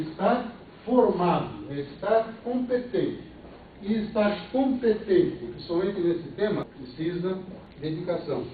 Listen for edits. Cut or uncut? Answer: cut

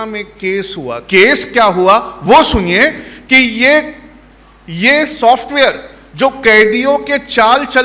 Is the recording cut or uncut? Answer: cut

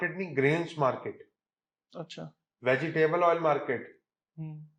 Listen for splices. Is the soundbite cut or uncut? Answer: uncut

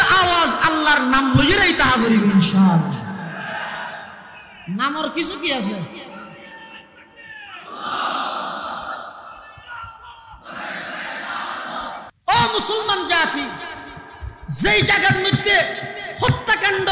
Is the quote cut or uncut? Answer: cut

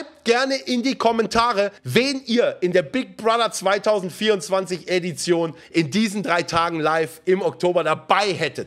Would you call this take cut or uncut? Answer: cut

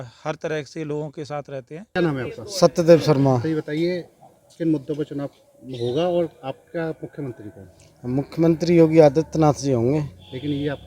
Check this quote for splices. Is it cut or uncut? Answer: cut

